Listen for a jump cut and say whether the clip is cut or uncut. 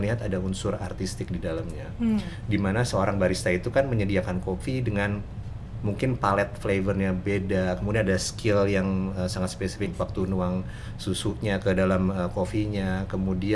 uncut